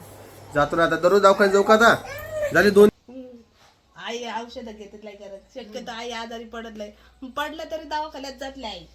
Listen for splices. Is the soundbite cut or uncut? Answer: cut